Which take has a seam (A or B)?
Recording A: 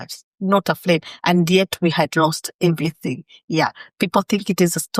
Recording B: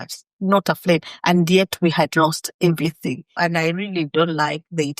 B